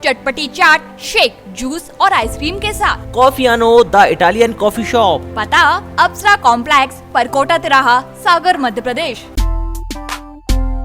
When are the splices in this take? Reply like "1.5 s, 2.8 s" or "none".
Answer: 9.3 s

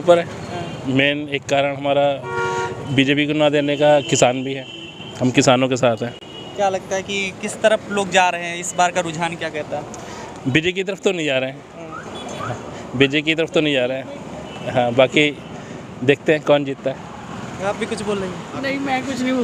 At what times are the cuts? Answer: none

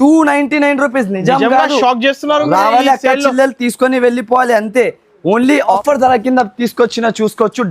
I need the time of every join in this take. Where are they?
5.8 s

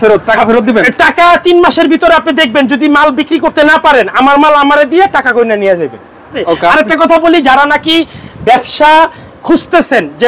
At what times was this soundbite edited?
6.4 s

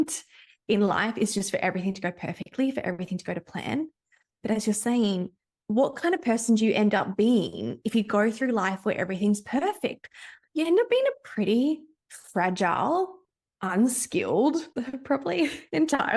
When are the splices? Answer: none

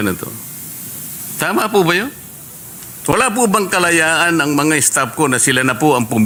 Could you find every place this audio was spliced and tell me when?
none

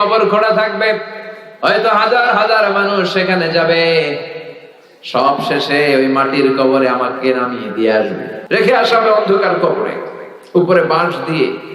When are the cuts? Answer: 8.3 s

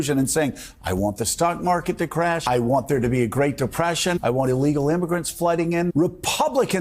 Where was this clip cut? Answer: 2.4 s, 4.2 s, 5.9 s

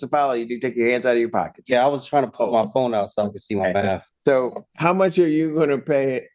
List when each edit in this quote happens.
4.6 s

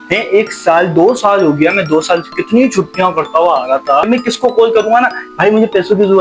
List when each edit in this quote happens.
4.1 s

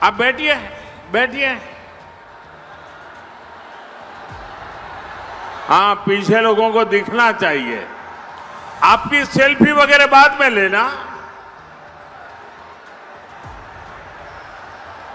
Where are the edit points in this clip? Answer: none

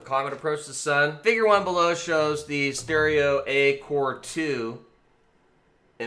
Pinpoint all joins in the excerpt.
1.9 s

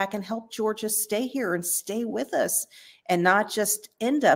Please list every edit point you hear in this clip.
none

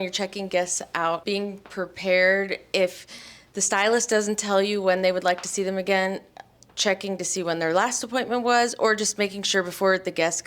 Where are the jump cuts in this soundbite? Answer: 1.2 s

